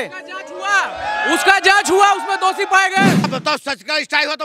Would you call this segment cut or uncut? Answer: cut